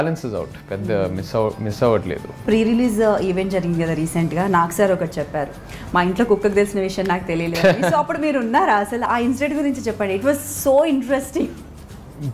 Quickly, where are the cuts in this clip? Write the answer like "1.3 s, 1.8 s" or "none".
2.4 s, 9.1 s